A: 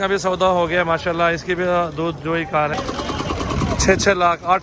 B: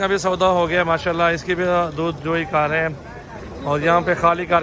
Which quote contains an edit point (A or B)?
A